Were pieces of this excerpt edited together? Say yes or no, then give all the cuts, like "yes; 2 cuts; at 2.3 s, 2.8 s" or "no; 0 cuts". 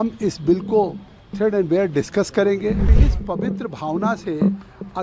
yes; 1 cut; at 2.9 s